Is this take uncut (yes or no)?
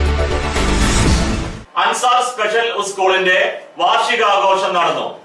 no